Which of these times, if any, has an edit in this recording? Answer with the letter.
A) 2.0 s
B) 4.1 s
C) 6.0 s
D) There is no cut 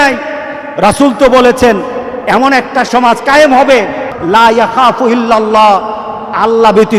B